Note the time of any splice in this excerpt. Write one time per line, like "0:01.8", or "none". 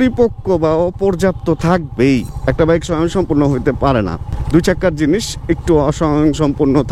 none